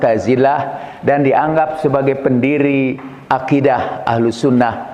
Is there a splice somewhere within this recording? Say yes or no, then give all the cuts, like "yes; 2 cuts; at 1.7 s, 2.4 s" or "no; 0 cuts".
no; 0 cuts